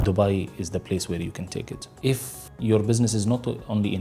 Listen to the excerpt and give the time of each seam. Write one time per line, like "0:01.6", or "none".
0:02.0